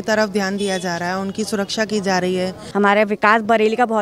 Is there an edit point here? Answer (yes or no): yes